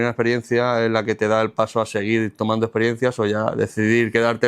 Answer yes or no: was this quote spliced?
no